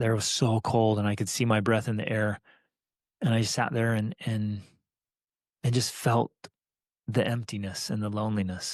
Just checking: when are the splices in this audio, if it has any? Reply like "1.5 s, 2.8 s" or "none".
none